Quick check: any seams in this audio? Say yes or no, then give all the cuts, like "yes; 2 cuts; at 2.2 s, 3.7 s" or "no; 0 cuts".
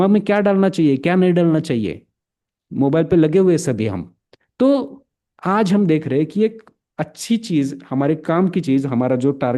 no; 0 cuts